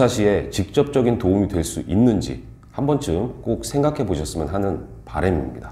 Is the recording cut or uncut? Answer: uncut